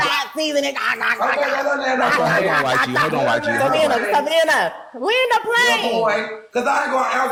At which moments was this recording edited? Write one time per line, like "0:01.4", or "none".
none